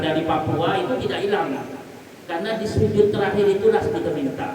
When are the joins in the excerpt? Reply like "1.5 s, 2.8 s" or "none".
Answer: none